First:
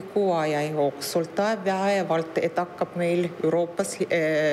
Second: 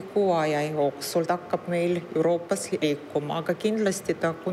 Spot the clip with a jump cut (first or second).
second